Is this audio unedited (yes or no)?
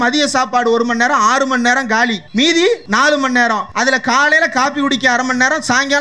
no